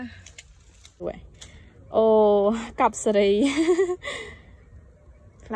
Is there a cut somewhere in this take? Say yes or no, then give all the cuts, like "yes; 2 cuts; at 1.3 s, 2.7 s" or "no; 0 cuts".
yes; 1 cut; at 1.0 s